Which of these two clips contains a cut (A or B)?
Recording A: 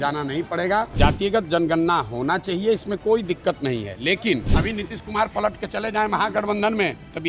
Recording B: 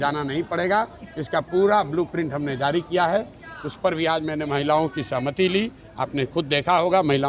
A